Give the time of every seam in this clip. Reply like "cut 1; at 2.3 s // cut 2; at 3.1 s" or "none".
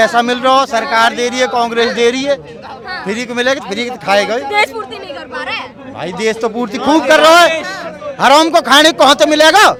none